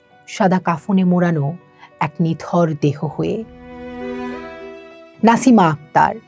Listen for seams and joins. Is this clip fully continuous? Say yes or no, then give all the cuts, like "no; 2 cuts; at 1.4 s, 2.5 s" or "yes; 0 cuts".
yes; 0 cuts